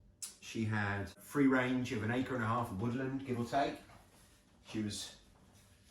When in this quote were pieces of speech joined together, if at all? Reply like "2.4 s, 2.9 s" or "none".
1.2 s